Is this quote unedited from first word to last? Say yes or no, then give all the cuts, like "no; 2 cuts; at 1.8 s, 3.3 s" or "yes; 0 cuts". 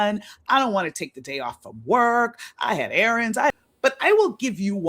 no; 1 cut; at 3.5 s